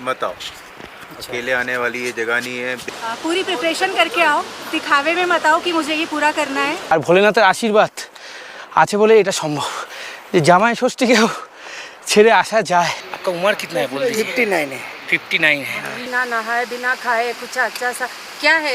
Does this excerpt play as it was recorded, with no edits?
no; 4 cuts; at 2.9 s, 6.8 s, 13.1 s, 16.0 s

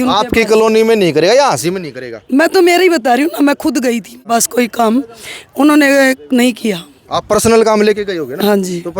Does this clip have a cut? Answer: no; 0 cuts

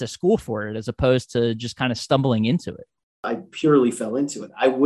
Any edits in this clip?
yes; 1 cut; at 3.3 s

